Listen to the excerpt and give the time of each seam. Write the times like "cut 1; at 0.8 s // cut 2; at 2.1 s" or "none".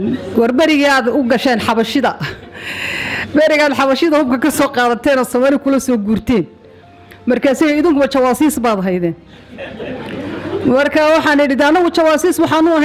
none